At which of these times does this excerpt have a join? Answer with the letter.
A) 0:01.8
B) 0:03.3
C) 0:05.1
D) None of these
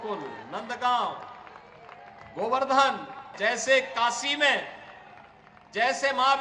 B